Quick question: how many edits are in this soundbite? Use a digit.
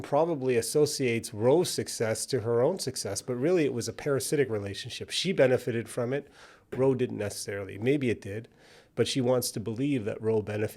0